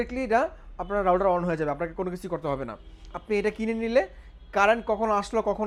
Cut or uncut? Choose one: uncut